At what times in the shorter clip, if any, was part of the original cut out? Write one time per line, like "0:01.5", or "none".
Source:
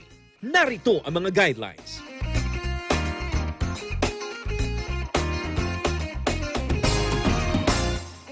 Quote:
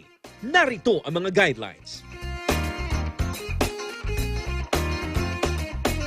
0:02.1